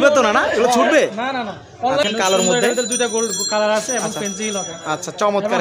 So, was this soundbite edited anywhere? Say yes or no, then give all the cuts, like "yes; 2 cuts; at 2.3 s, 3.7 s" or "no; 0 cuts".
yes; 1 cut; at 2.0 s